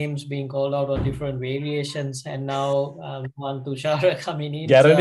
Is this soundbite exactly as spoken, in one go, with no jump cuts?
yes; 0 cuts

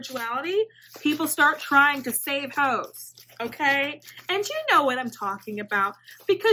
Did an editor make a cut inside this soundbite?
no; 0 cuts

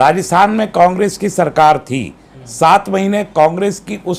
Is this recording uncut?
yes; 0 cuts

